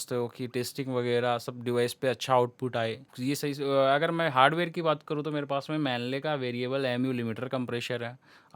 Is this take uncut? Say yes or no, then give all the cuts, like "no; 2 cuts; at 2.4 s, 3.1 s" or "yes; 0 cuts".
no; 1 cut; at 3.1 s